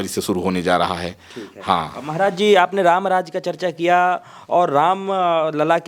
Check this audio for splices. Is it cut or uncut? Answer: uncut